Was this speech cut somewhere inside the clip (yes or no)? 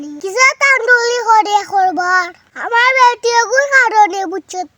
yes